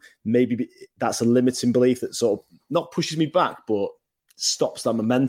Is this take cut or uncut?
uncut